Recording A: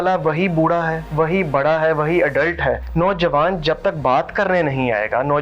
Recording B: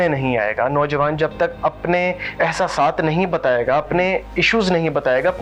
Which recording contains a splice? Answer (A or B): A